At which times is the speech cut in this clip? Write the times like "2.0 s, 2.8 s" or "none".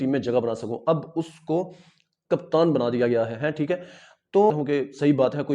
4.5 s